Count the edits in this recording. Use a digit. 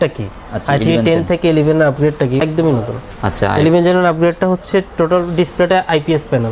1